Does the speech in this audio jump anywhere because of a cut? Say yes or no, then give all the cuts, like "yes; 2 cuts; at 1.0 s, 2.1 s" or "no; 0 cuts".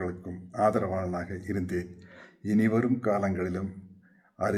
no; 0 cuts